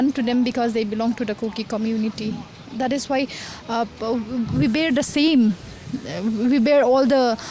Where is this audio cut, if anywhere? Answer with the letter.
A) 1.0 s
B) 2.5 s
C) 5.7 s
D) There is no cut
D